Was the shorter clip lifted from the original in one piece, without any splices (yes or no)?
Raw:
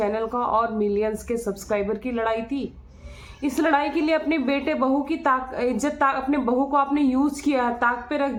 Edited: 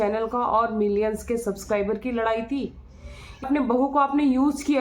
no